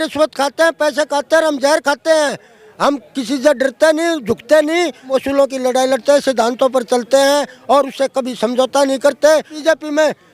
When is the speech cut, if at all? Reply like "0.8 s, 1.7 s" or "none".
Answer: 5.1 s, 9.5 s